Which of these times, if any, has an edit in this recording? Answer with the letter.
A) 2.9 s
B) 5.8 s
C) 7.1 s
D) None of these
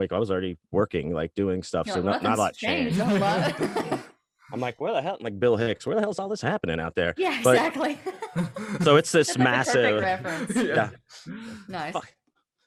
D